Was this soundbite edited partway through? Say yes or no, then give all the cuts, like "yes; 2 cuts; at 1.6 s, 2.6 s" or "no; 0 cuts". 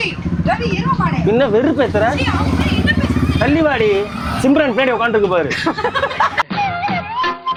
no; 0 cuts